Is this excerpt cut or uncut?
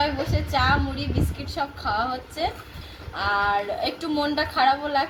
uncut